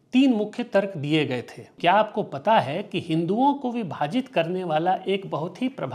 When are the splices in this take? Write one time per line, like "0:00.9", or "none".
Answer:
0:01.7